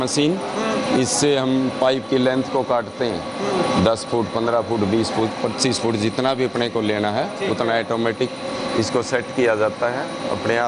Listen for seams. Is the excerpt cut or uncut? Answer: uncut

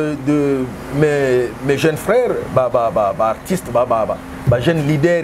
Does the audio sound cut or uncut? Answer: uncut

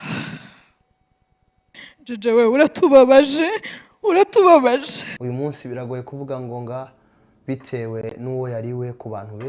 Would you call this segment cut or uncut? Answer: cut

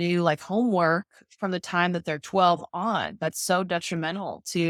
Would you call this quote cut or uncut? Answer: uncut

